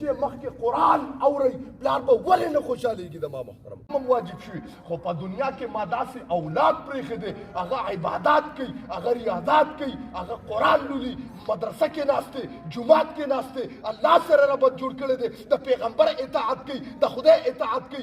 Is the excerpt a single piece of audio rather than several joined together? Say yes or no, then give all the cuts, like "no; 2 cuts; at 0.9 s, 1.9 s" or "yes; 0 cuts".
no; 1 cut; at 3.9 s